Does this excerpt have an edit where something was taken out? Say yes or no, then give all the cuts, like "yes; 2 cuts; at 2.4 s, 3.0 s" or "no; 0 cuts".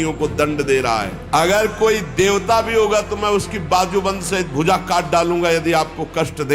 yes; 1 cut; at 1.2 s